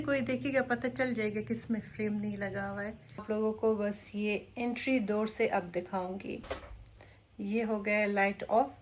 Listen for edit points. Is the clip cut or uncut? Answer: cut